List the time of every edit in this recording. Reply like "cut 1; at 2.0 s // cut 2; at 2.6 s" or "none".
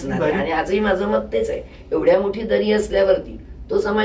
none